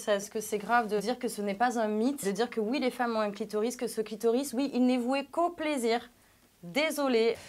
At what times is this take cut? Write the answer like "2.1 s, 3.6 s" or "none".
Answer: none

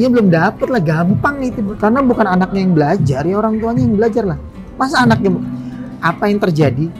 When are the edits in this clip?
1.6 s

